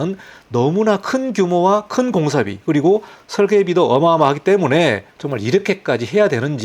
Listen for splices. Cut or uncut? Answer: uncut